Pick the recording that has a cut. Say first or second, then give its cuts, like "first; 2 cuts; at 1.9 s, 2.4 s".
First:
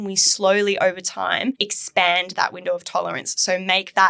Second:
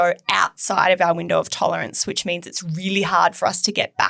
first; 1 cut; at 1.7 s